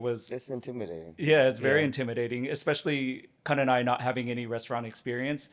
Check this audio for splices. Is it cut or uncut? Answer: uncut